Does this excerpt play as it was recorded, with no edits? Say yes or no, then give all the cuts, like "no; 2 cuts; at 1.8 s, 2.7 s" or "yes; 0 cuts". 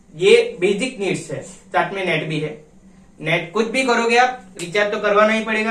yes; 0 cuts